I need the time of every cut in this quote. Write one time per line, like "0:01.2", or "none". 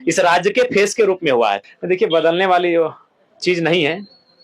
0:01.6